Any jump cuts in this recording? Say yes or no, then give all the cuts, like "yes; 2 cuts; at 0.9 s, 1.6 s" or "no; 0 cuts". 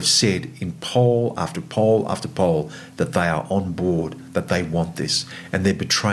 no; 0 cuts